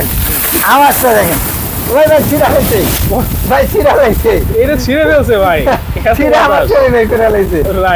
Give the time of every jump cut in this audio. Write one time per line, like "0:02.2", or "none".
none